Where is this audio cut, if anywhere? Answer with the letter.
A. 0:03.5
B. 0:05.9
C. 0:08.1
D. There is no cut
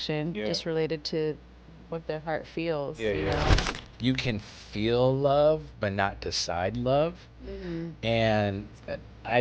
A